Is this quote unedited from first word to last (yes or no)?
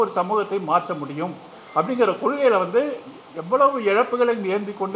yes